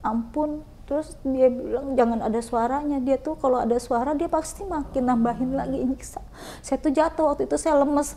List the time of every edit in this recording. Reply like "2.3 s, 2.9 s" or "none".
none